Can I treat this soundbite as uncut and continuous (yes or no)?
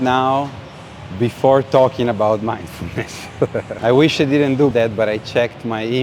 no